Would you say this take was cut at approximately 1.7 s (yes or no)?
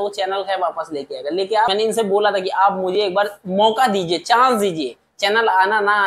yes